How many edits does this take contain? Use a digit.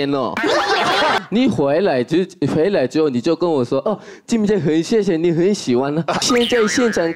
2